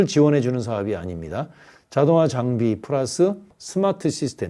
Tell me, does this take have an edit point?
yes; 1 cut; at 3.6 s

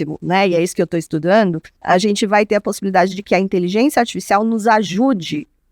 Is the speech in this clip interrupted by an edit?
yes; 1 cut; at 1.7 s

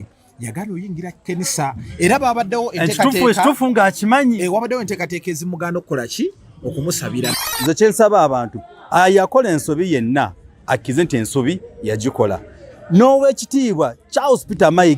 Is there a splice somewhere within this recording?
yes; 1 cut; at 7.4 s

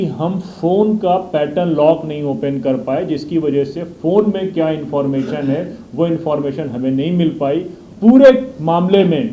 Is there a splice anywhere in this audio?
yes; 1 cut; at 7.8 s

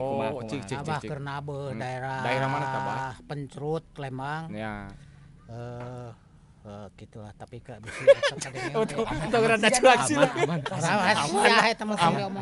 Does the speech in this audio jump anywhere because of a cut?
no; 0 cuts

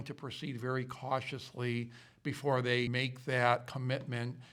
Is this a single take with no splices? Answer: no; 1 cut; at 2.9 s

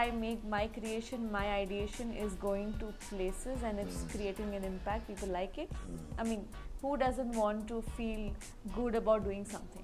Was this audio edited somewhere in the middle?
no; 0 cuts

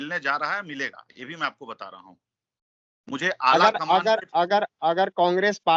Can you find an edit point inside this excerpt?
no; 0 cuts

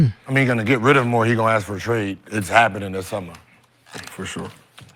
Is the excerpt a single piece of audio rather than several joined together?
yes; 0 cuts

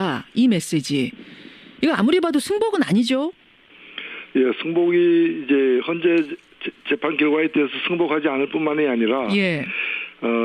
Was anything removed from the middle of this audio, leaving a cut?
no; 0 cuts

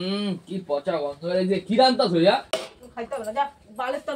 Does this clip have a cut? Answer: yes; 1 cut; at 2.5 s

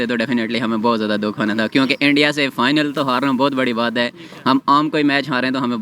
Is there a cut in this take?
no; 0 cuts

